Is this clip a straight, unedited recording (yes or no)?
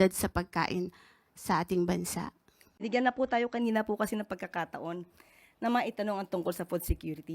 no